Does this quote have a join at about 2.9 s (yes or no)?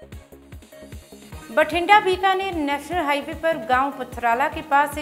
no